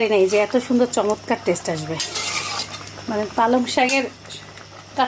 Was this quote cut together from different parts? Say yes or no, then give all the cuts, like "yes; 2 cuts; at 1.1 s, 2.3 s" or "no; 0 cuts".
no; 0 cuts